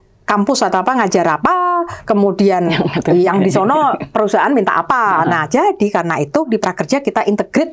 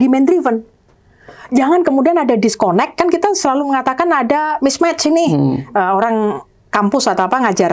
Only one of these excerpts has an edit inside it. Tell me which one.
first; 1 cut; at 6.5 s

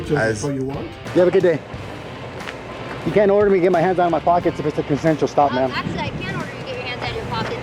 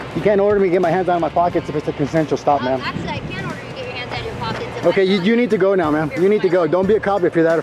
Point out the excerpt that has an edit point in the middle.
first; 1 cut; at 1.0 s

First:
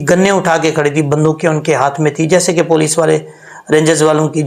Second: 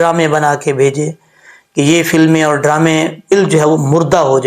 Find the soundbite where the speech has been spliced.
second; 1 cut; at 3.3 s

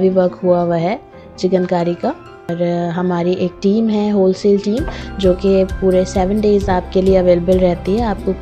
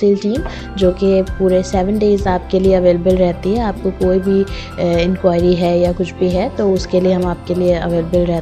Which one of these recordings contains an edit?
first; 1 cut; at 2.5 s

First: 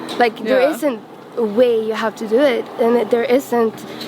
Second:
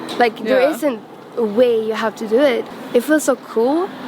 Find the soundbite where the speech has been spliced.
second; 1 cut; at 2.7 s

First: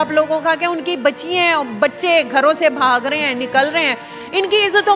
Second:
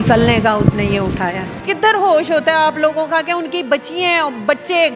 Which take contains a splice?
second; 1 cut; at 1.6 s

